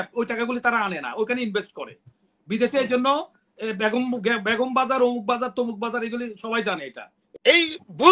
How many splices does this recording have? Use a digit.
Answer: 1